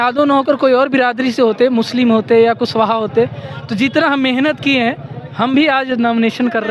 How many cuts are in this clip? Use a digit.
0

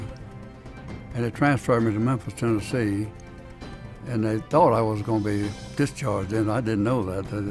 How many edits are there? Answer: 1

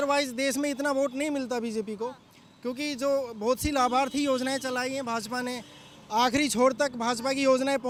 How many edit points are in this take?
0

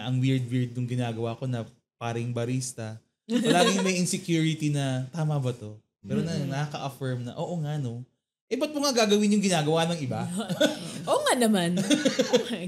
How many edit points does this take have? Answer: 0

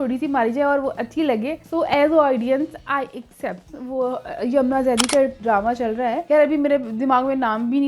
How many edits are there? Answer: 1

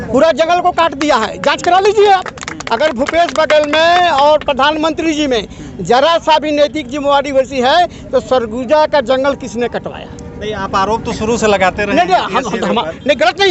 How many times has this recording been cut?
0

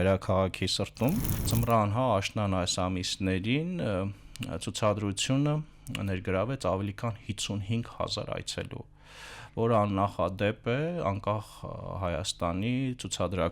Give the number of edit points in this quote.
1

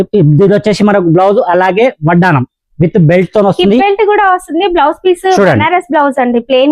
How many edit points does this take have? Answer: 0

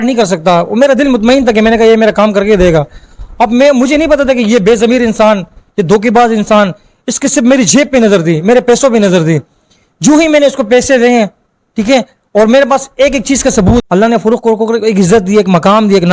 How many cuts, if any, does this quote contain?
1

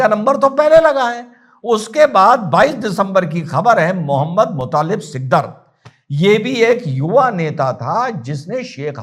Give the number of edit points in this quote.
0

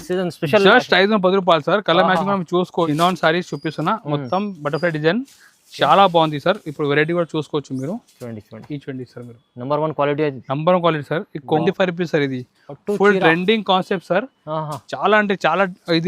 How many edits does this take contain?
2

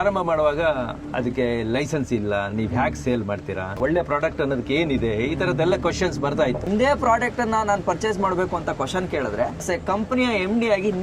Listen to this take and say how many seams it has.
2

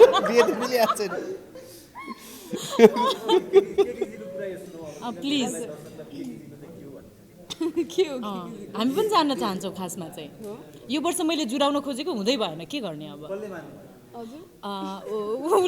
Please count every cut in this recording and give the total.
0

